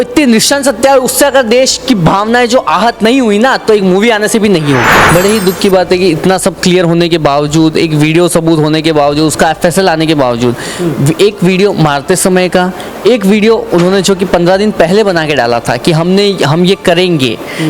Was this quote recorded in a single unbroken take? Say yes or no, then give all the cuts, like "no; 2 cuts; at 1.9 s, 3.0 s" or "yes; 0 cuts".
no; 1 cut; at 5.0 s